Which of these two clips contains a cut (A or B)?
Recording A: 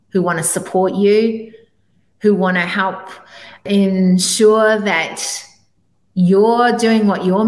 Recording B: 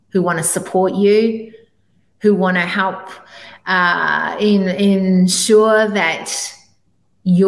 A